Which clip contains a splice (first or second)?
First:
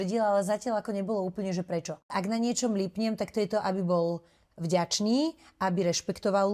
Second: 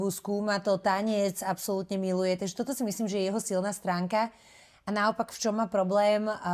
first